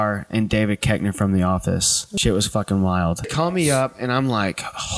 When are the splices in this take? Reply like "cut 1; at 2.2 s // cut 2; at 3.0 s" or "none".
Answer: cut 1; at 2.0 s // cut 2; at 3.3 s